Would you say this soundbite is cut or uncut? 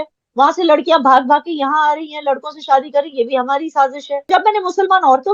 cut